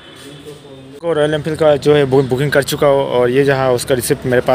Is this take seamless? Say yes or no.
no